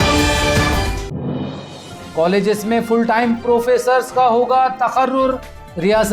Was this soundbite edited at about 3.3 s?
no; 1 cut; at 1.9 s

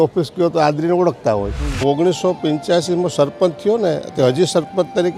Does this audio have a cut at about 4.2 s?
no; 1 cut; at 1.7 s

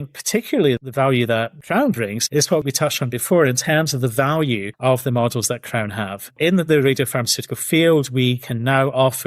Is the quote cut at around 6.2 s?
yes; 1 cut; at 6.2 s

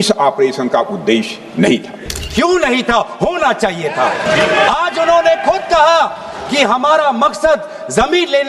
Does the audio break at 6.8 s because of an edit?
no; 2 cuts; at 2.2 s, 4.2 s

